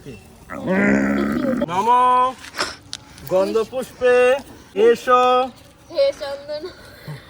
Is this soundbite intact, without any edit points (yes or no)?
no